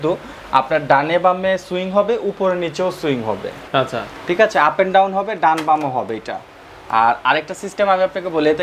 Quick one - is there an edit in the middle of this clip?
no; 0 cuts

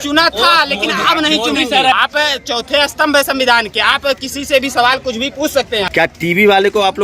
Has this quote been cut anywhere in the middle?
yes; 2 cuts; at 2.0 s, 5.9 s

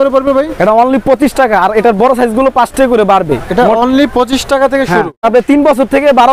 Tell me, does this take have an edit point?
yes; 1 cut; at 5.3 s

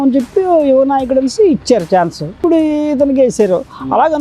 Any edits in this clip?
yes; 1 cut; at 2.4 s

